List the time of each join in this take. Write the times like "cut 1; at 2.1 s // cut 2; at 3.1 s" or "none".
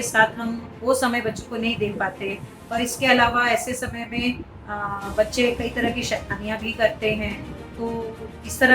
none